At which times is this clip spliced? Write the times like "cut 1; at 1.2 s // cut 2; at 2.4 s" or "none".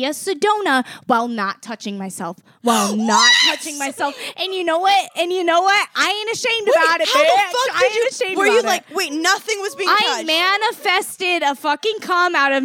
none